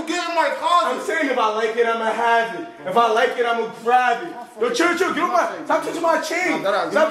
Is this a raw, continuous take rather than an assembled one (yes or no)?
yes